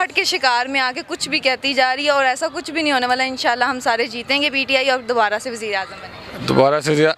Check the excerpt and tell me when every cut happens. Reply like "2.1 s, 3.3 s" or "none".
none